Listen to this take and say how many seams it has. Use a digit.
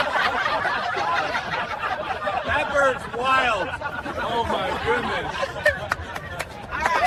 0